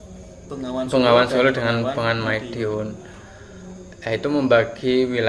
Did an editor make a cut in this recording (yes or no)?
no